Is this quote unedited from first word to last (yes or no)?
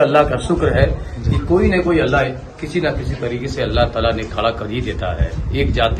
yes